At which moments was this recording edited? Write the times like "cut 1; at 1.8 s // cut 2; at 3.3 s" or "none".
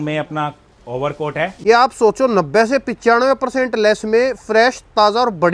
cut 1; at 1.5 s

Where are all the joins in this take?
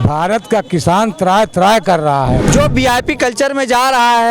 cut 1; at 2.4 s

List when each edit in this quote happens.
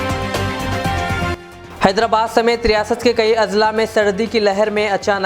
cut 1; at 1.5 s

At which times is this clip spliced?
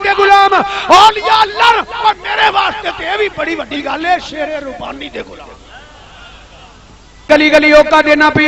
cut 1; at 7.3 s

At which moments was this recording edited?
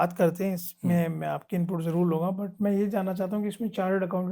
none

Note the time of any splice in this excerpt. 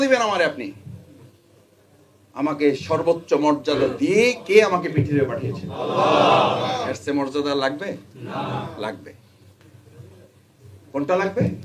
none

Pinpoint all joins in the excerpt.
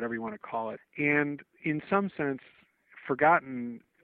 cut 1; at 0.8 s // cut 2; at 1.5 s

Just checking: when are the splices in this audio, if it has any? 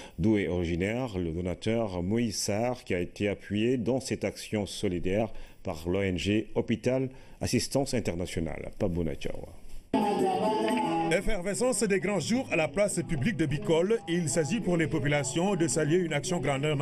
none

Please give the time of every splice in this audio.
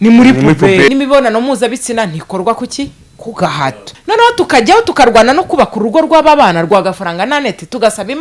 cut 1; at 0.9 s // cut 2; at 3.9 s

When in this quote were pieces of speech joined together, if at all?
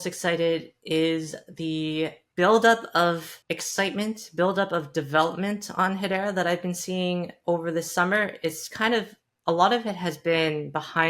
cut 1; at 2.2 s // cut 2; at 3.3 s

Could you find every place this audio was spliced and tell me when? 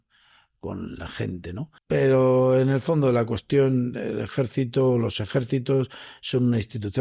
cut 1; at 1.8 s

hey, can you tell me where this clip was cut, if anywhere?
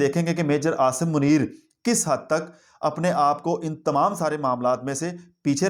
none

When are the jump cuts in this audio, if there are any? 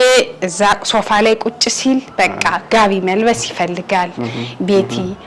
none

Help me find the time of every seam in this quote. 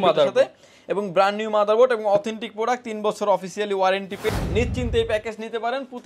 cut 1; at 4.3 s

